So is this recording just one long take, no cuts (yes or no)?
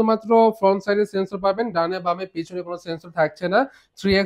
yes